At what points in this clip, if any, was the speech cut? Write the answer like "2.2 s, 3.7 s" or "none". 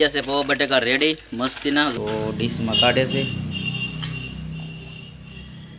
1.9 s